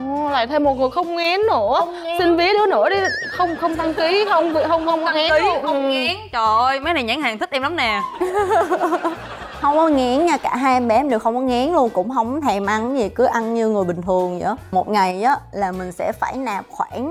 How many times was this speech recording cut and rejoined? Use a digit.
0